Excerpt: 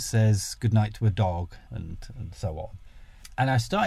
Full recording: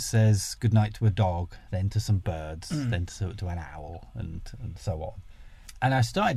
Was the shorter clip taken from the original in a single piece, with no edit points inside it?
no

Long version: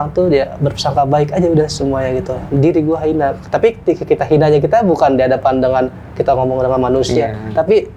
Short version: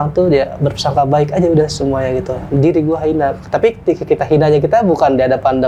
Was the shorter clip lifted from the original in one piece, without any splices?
yes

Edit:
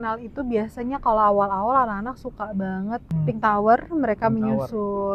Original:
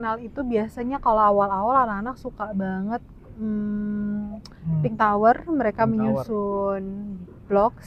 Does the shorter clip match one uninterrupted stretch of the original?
no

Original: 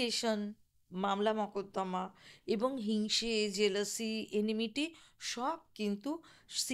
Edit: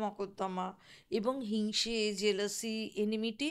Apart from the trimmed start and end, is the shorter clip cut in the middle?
no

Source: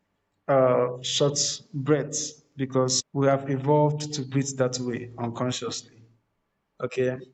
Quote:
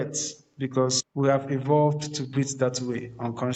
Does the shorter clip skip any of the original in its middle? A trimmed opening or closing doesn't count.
no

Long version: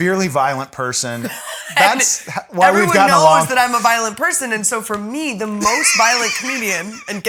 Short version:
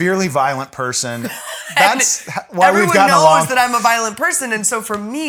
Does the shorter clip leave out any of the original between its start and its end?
no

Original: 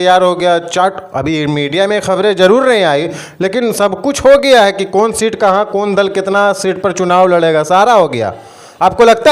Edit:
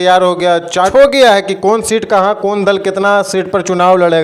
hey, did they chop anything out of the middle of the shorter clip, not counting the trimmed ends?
yes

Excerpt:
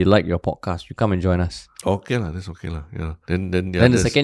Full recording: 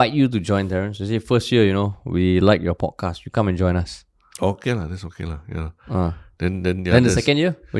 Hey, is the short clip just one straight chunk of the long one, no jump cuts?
no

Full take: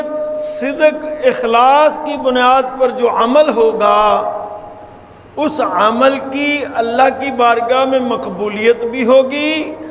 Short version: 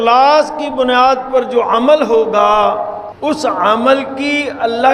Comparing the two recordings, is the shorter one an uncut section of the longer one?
no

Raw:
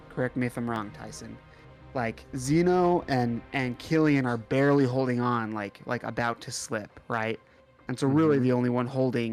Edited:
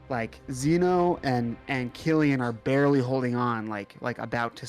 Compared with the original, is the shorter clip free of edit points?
yes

